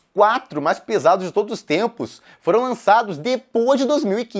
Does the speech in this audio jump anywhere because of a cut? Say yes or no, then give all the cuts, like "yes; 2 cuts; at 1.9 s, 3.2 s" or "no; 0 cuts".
no; 0 cuts